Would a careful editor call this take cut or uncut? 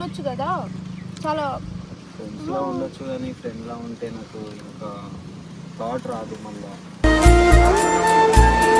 cut